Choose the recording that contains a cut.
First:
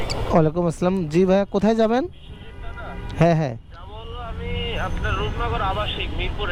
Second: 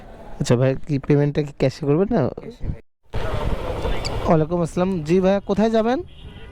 second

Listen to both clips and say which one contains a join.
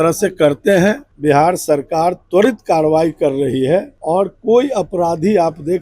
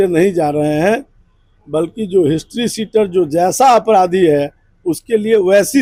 first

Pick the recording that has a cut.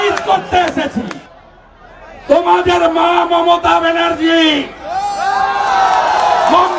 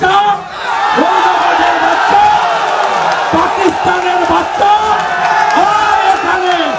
first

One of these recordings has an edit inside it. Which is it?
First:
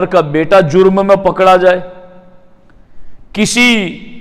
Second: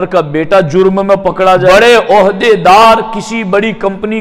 second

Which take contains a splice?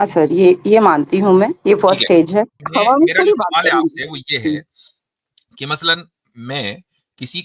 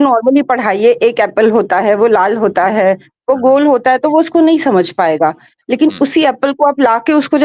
first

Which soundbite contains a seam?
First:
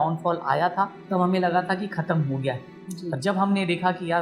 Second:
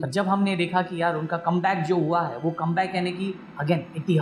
first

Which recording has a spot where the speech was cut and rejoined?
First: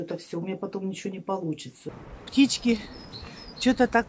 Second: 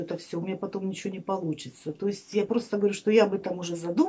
first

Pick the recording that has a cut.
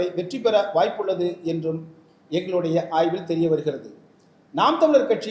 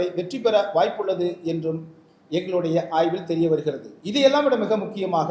second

